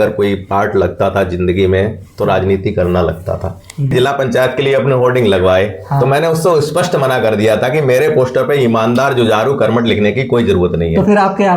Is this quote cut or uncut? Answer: cut